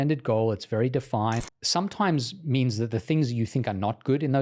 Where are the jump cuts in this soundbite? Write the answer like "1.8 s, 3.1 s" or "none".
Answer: 1.4 s